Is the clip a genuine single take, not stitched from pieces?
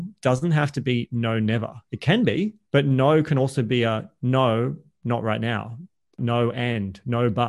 no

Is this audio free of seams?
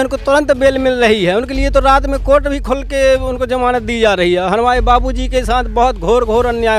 yes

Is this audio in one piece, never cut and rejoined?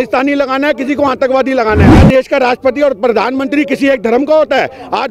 no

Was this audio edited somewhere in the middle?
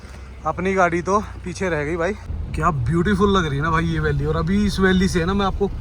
yes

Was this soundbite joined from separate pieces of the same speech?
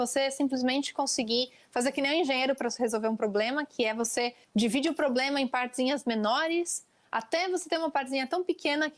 no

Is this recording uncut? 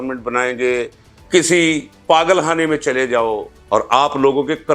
no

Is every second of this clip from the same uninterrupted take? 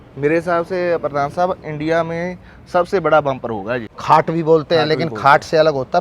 no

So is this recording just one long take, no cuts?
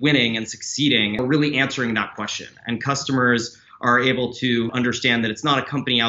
no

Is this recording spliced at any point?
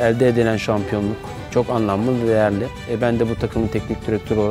no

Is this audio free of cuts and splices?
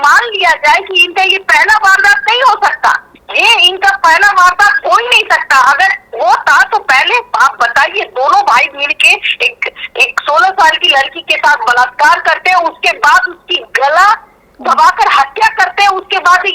yes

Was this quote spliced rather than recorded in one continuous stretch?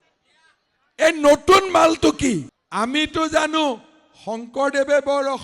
yes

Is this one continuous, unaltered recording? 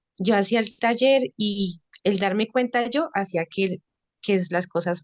yes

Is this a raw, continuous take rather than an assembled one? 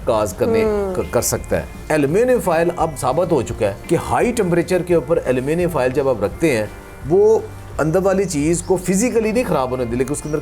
no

